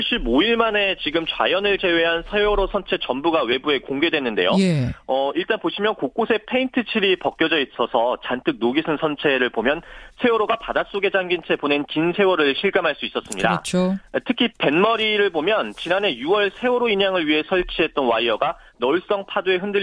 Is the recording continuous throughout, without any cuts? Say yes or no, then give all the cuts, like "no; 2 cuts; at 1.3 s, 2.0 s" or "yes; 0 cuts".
no; 1 cut; at 14.0 s